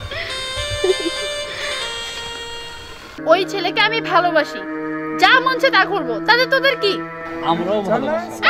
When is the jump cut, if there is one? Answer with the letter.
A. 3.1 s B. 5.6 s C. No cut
A